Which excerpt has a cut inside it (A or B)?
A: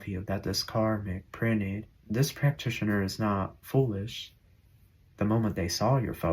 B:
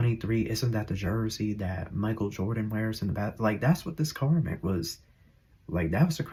A